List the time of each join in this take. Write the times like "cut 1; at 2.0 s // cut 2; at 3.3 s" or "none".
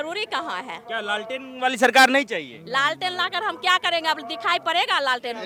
none

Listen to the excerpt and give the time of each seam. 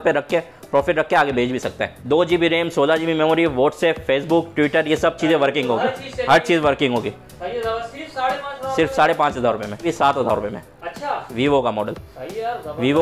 cut 1; at 1.9 s // cut 2; at 9.9 s

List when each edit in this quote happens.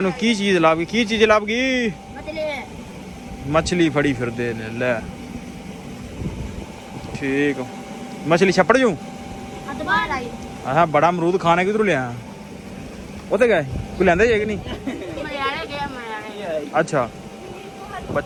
none

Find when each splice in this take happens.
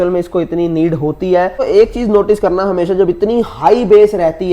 cut 1; at 1.6 s

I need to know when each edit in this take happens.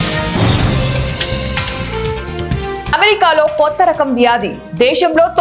cut 1; at 0.8 s // cut 2; at 2.9 s

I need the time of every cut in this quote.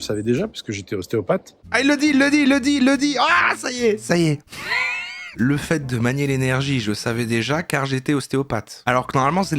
cut 1; at 1.6 s // cut 2; at 5.3 s

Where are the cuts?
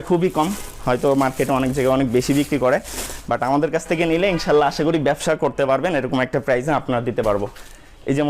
none

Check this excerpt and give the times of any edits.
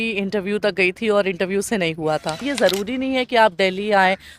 cut 1; at 2.5 s

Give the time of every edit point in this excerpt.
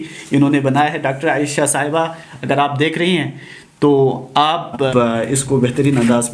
cut 1; at 4.9 s

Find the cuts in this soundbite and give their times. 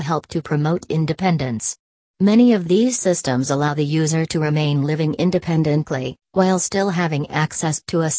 none

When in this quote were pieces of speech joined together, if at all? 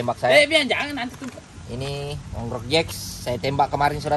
none

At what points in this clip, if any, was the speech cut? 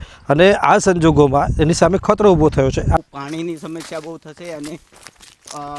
cut 1; at 3.0 s

